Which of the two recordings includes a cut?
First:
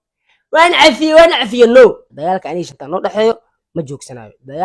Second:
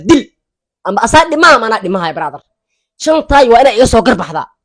first; 1 cut; at 2.1 s

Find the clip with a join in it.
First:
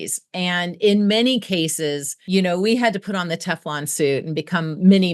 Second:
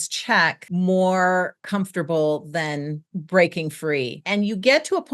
second; 1 cut; at 4.2 s

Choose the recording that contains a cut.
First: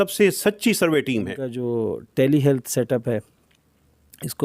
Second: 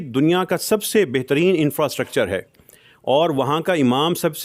first; 1 cut; at 1.6 s

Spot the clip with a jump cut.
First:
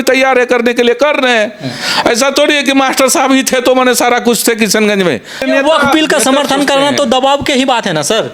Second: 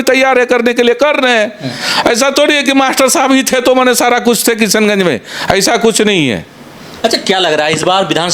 first; 1 cut; at 5.4 s

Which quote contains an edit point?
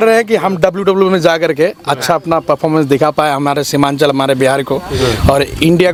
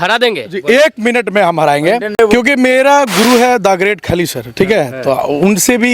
second; 1 cut; at 2.2 s

